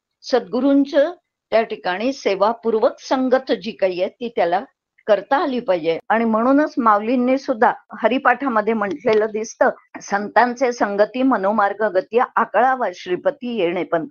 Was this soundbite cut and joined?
yes; 3 cuts; at 6.0 s, 7.9 s, 9.9 s

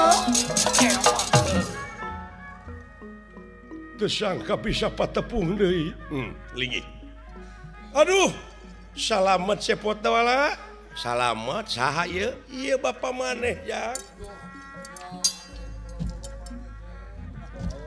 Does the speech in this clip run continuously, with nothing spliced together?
yes; 0 cuts

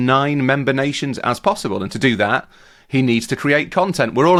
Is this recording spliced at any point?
no; 0 cuts

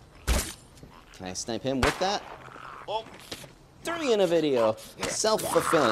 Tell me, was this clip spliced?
no; 0 cuts

